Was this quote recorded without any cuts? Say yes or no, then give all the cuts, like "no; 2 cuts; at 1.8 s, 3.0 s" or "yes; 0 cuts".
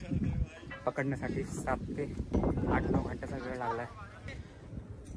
no; 2 cuts; at 2.3 s, 4.3 s